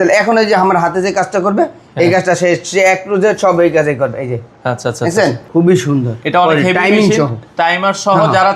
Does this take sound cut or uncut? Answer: cut